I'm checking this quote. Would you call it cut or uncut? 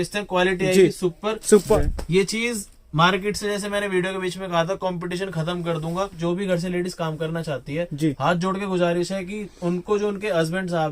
cut